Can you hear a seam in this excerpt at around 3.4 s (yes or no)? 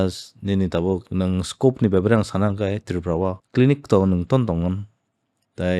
yes